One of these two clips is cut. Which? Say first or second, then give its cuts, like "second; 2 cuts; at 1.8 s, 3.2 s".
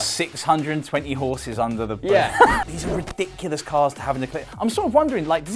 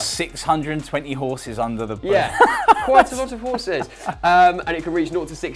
first; 1 cut; at 2.6 s